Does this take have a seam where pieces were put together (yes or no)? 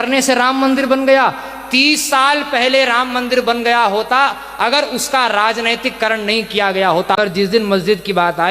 yes